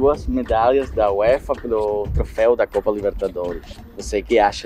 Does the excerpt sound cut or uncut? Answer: uncut